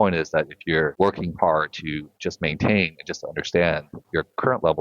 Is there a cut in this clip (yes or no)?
no